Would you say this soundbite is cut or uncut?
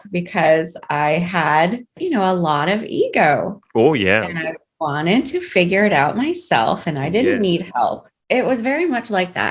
cut